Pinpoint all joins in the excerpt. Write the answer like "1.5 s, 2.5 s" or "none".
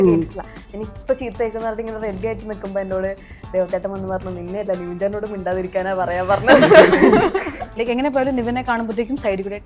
7.7 s